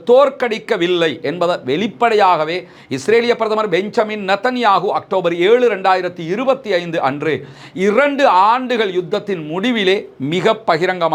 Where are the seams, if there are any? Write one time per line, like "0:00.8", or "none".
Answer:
none